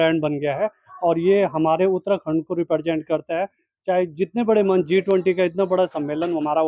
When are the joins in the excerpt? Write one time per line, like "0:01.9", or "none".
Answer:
none